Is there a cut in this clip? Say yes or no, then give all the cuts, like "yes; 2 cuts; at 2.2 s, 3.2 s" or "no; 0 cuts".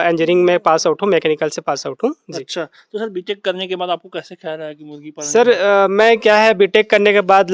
no; 0 cuts